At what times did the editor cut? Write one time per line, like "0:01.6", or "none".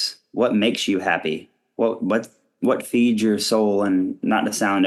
none